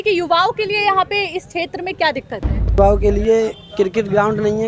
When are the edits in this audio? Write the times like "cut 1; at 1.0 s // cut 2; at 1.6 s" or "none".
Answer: cut 1; at 2.8 s